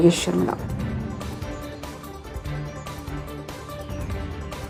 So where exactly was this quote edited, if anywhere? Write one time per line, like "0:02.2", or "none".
none